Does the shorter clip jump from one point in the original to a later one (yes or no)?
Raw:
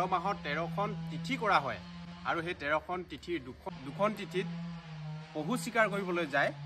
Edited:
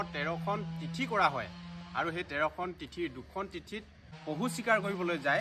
yes